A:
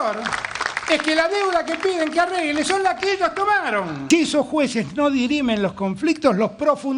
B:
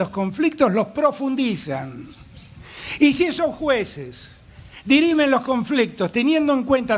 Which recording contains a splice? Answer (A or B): A